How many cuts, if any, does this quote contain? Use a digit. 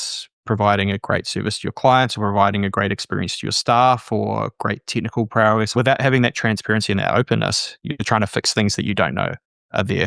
1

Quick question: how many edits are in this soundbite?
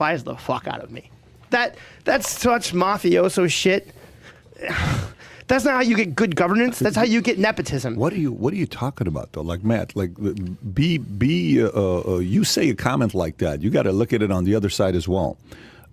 1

